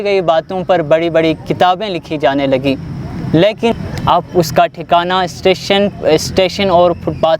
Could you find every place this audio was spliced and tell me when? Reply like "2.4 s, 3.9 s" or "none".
3.7 s